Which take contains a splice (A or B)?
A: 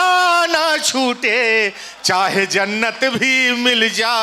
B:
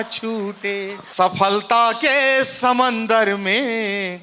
B